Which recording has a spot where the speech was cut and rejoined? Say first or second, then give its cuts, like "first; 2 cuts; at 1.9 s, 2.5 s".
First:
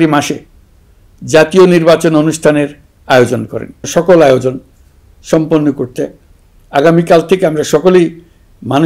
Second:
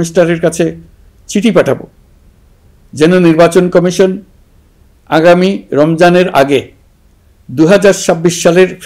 first; 1 cut; at 3.9 s